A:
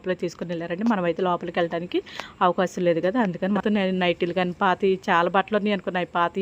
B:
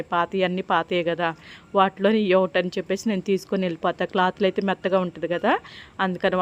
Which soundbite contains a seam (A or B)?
A